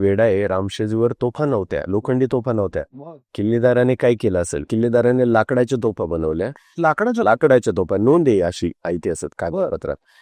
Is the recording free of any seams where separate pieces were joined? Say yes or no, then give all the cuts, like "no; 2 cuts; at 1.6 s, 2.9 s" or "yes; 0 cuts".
no; 1 cut; at 4.7 s